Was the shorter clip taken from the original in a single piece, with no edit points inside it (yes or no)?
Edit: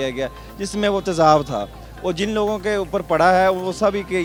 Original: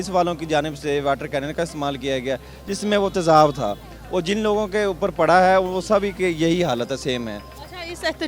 yes